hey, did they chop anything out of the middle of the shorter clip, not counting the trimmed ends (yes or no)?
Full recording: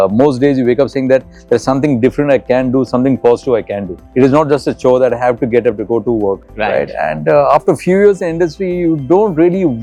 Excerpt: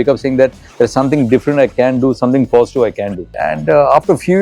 yes